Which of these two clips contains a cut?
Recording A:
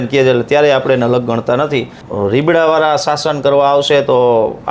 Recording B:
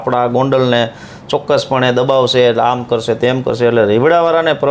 A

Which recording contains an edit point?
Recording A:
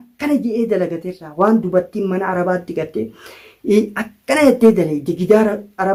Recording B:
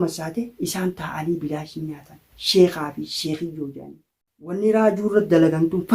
B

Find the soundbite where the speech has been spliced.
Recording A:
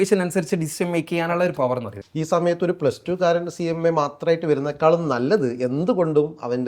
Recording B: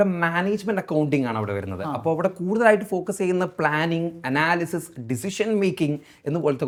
A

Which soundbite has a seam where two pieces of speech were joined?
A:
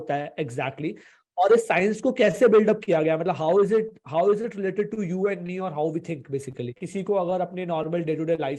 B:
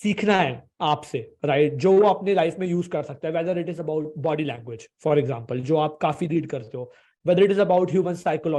A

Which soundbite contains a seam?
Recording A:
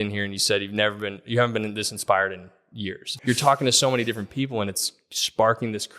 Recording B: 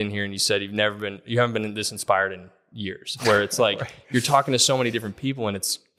A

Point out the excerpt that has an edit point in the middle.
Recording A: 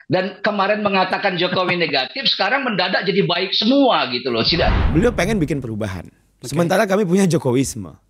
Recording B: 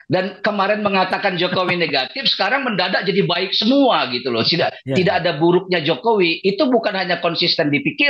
A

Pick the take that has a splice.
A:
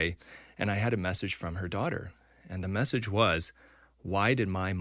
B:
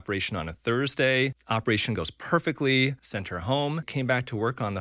B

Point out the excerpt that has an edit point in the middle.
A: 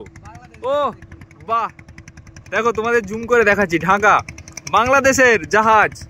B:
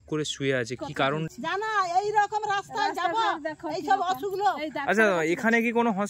B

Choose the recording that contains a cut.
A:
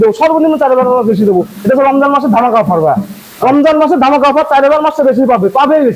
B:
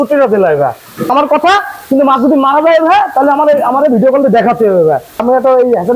B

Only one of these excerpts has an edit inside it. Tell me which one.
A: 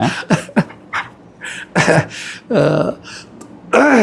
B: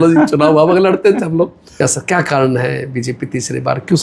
B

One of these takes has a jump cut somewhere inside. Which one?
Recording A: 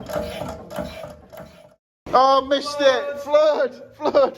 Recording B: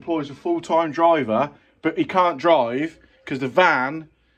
A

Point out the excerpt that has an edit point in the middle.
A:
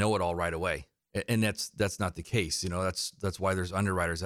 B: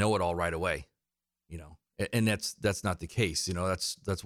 A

